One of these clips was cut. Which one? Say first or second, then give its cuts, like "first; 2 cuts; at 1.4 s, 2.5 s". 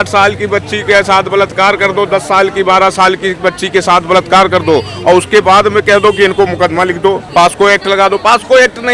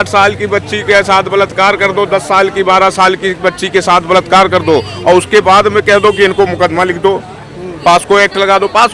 first; 1 cut; at 7.2 s